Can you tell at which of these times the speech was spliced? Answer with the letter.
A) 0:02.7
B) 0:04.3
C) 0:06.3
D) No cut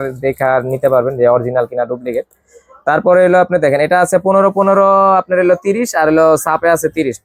D